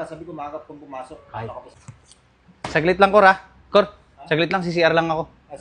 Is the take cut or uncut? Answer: cut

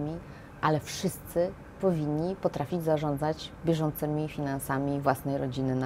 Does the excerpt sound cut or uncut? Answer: uncut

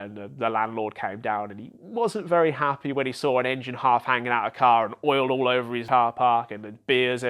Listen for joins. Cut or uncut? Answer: cut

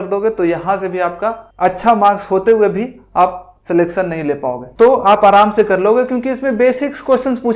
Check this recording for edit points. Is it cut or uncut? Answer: cut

